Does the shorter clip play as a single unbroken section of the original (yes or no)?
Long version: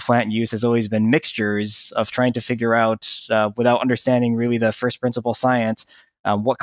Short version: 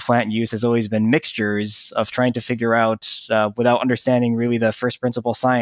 yes